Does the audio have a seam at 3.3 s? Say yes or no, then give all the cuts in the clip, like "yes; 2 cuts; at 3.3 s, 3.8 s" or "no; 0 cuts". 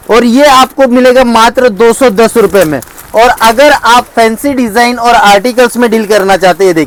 no; 0 cuts